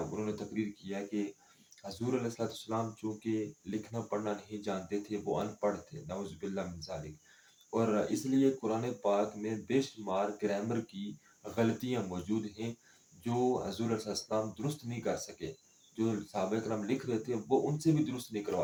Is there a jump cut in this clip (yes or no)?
no